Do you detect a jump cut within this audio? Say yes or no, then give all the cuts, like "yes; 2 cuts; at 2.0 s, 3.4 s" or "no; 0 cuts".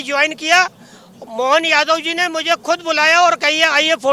no; 0 cuts